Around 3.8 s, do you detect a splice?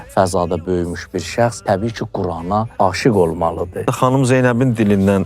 yes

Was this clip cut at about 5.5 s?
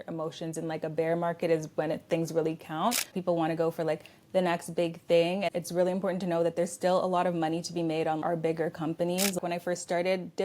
yes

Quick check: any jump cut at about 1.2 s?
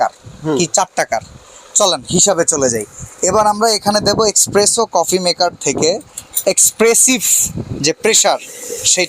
no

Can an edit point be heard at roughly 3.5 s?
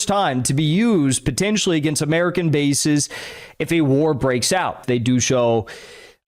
no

